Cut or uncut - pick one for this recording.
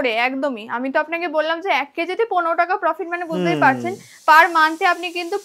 uncut